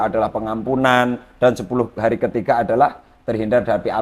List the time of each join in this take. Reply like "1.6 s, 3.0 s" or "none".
none